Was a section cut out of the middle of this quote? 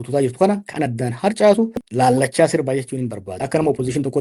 yes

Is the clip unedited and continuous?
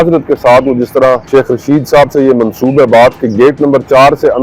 no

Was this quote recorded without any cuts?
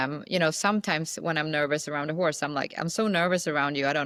yes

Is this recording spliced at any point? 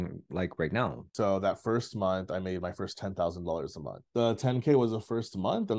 yes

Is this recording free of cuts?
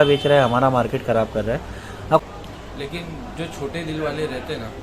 no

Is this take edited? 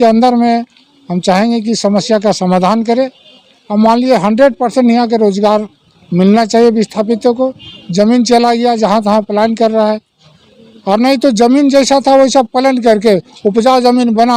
no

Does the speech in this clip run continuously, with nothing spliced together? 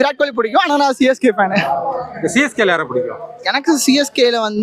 yes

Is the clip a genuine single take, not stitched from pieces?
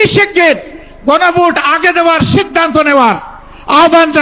yes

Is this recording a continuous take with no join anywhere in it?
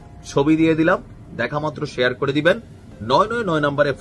yes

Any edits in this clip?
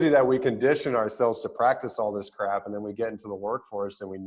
no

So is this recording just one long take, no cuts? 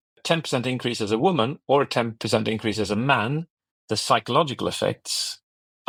yes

